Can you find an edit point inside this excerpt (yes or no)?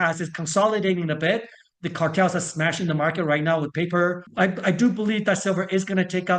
yes